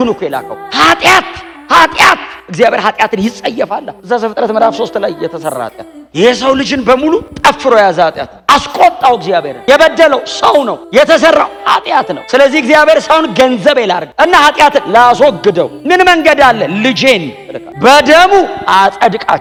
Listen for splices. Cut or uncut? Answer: uncut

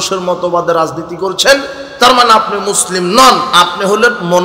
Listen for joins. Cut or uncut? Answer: uncut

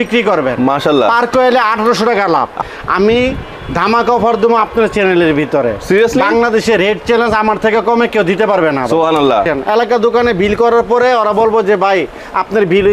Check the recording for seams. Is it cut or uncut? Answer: cut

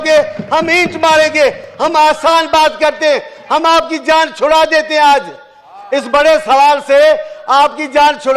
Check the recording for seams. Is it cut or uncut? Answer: uncut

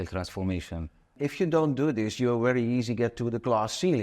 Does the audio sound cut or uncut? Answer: cut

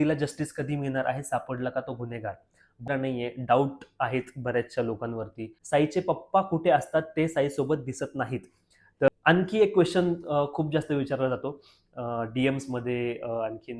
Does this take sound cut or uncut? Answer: cut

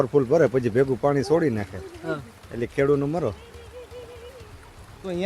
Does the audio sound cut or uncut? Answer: uncut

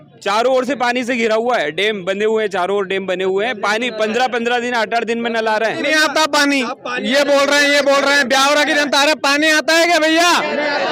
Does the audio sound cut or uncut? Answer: cut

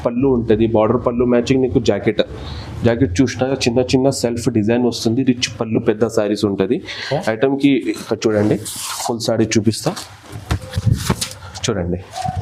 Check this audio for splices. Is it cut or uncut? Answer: uncut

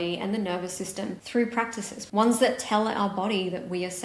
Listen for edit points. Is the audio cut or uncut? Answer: cut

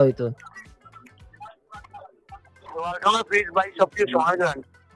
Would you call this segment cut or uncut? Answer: uncut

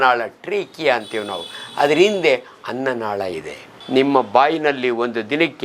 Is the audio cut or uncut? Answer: cut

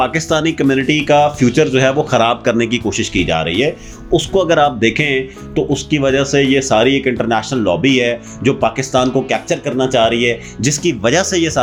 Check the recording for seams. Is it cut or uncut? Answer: uncut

